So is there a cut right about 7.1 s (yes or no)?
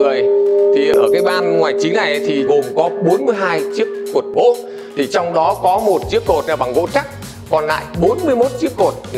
no